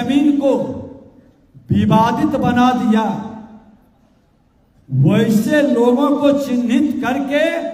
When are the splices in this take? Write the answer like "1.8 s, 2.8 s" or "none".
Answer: none

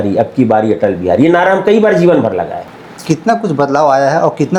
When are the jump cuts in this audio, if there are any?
2.6 s

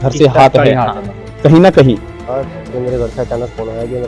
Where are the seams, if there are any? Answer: 2.2 s

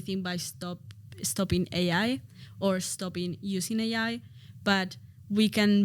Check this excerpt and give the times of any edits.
none

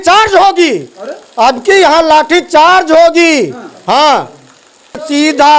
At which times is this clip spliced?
4.7 s

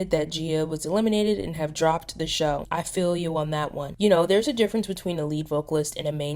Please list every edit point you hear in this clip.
3.9 s

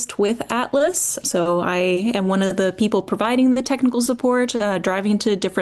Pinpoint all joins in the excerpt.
none

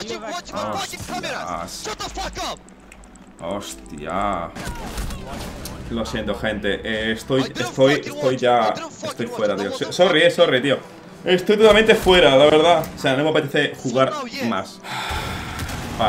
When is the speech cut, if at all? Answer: 14.8 s

